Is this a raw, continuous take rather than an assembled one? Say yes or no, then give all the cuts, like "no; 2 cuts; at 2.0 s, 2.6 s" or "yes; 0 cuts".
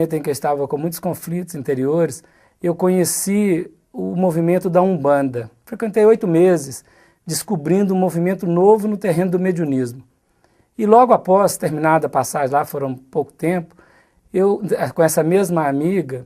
no; 1 cut; at 8.3 s